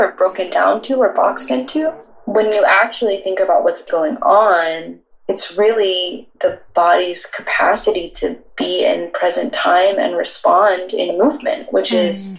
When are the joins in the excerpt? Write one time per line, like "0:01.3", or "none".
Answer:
0:02.0
0:03.9